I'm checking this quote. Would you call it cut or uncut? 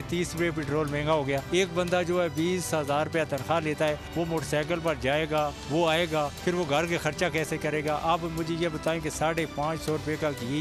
uncut